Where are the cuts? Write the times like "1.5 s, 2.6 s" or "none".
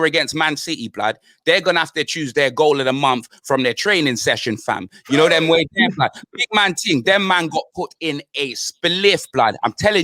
none